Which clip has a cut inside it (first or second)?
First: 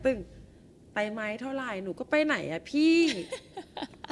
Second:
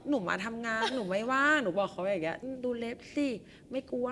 second